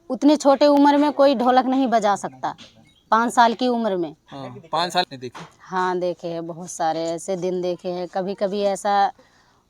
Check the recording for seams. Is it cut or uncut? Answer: cut